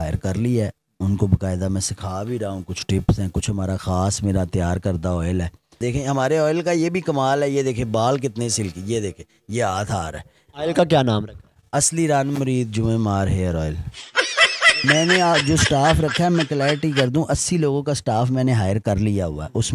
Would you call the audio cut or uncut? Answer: cut